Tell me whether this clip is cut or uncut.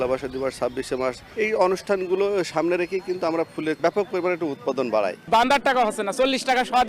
cut